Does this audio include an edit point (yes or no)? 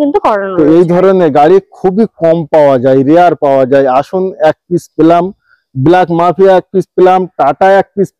no